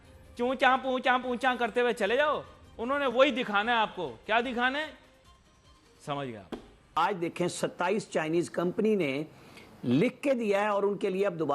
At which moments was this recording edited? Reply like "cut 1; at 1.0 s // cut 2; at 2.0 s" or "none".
cut 1; at 6.8 s